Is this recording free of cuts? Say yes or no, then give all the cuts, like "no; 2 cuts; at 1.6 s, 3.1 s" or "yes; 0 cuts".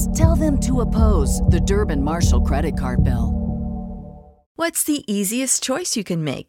no; 1 cut; at 4.6 s